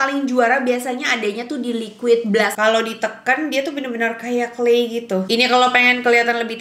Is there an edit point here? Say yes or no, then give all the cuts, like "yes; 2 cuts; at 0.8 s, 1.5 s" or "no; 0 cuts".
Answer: yes; 2 cuts; at 2.5 s, 5.2 s